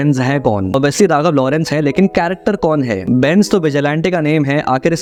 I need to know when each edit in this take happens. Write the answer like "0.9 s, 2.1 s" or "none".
none